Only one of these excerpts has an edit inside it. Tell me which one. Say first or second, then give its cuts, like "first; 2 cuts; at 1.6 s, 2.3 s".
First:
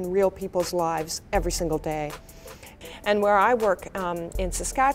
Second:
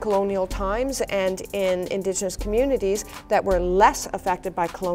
first; 1 cut; at 2.8 s